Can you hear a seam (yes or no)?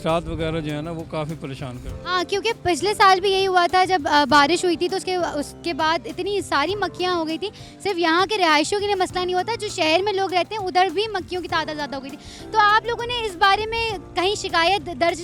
no